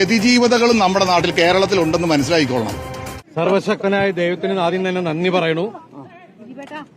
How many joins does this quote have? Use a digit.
1